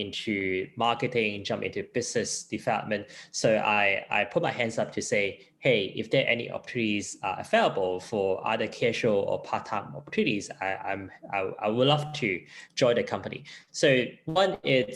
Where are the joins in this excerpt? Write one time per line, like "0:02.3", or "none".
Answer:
none